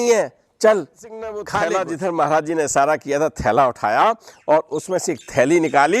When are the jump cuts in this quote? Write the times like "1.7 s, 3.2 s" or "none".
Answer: 1.5 s